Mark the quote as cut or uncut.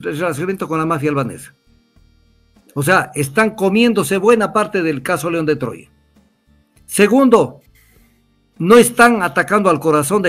uncut